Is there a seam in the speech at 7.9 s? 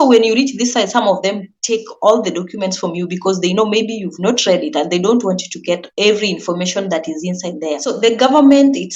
yes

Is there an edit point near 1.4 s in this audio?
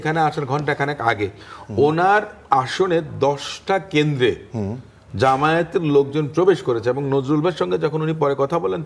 no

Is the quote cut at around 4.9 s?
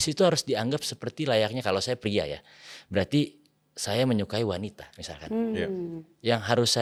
no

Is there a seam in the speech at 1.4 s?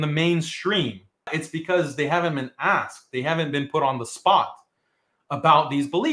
yes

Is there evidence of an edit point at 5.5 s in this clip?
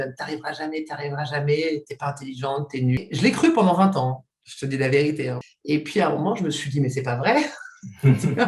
yes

